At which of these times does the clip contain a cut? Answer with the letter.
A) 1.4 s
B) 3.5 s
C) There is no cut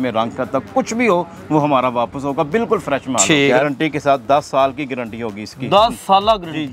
B